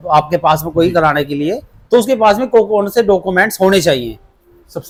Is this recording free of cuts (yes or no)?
yes